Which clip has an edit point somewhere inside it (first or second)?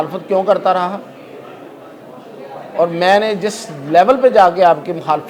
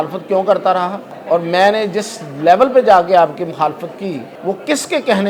second